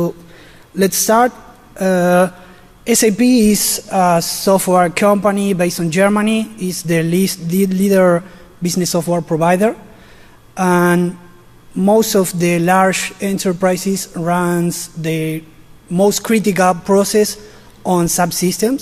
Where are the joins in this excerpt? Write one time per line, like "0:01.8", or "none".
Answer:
0:04.5